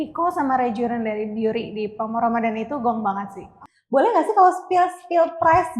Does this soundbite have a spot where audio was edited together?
yes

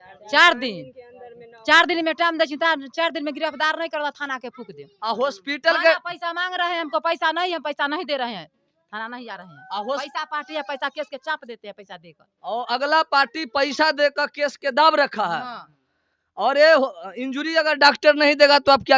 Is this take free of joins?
yes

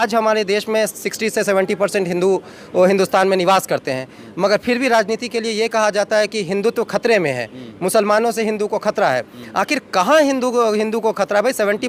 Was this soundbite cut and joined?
no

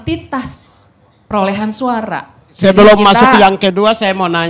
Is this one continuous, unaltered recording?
no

